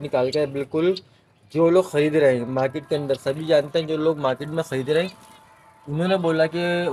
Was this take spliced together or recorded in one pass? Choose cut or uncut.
uncut